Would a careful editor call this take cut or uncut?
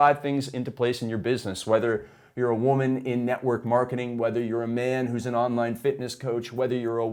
uncut